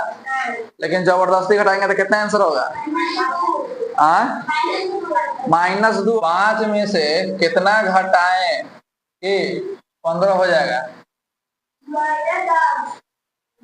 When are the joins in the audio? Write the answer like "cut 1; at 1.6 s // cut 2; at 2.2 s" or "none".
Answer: cut 1; at 6.2 s